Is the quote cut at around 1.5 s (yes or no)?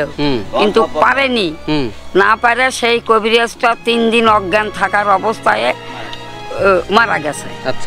no